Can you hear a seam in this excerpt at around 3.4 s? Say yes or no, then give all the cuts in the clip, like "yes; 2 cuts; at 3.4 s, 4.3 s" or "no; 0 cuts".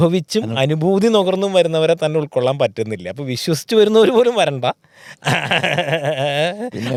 no; 0 cuts